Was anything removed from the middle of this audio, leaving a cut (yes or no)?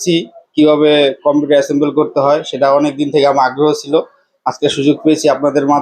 no